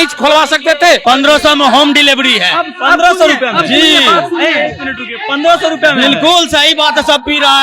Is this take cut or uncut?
cut